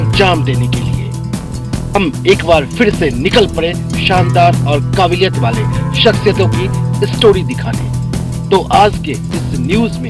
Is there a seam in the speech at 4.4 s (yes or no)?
no